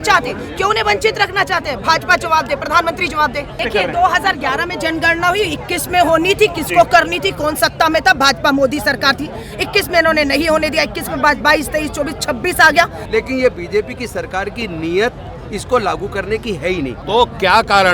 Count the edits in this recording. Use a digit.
3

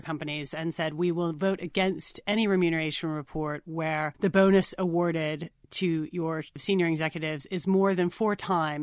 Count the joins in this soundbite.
2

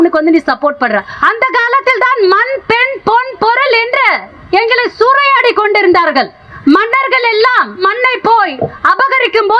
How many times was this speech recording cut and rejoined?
4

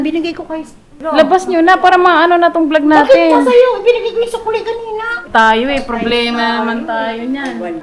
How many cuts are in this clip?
2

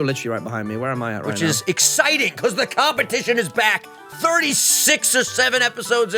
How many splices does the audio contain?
0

